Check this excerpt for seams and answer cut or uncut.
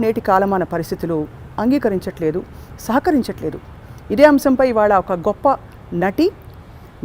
uncut